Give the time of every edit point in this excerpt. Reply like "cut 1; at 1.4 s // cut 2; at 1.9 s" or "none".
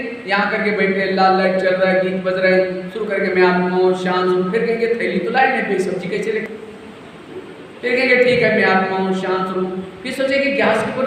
cut 1; at 6.4 s